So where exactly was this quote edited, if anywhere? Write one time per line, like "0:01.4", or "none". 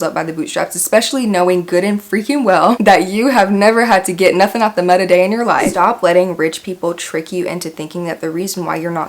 0:05.7